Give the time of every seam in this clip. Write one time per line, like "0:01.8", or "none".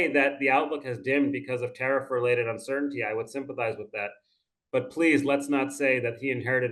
none